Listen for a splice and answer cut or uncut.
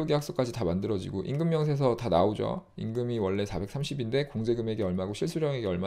uncut